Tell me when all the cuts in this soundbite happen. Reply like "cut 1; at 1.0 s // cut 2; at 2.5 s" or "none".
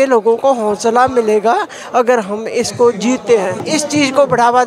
cut 1; at 3.6 s